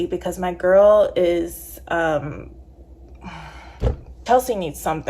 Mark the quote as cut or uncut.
cut